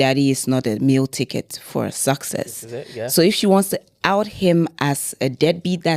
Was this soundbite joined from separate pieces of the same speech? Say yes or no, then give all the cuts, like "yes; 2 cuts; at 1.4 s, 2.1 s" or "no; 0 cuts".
no; 0 cuts